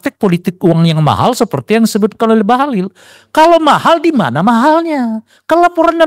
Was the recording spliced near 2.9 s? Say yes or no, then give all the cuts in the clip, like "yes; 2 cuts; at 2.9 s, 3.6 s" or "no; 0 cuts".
no; 0 cuts